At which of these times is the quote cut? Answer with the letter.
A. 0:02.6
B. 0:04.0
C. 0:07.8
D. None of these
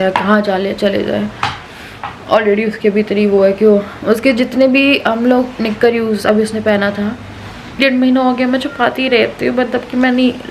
C